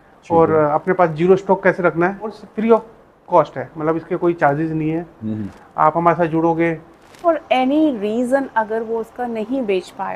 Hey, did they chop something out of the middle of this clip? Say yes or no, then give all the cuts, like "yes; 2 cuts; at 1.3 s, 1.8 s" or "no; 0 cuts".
yes; 2 cuts; at 2.4 s, 7.2 s